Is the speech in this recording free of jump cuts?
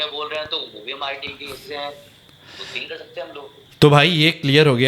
no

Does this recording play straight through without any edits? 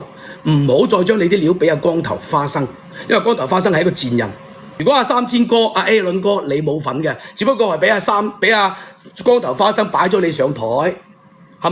no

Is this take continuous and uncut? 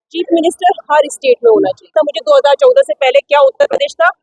no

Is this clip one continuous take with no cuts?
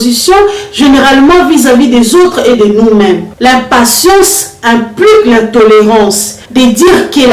no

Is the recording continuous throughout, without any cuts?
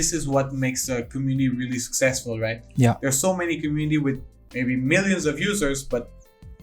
yes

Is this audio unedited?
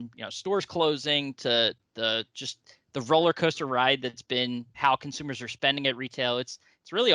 no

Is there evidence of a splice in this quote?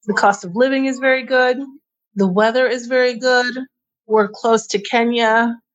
yes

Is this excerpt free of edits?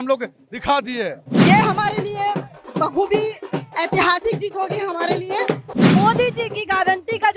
no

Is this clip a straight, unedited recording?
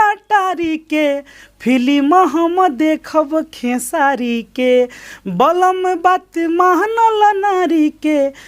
yes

